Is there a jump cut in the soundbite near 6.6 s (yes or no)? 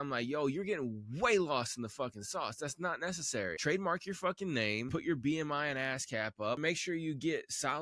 yes